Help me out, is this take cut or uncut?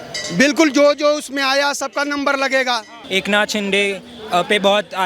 cut